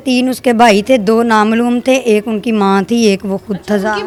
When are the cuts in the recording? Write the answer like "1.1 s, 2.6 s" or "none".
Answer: none